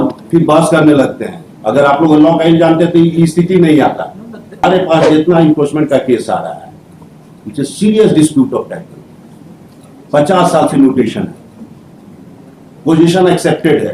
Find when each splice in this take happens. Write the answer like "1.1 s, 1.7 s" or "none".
4.6 s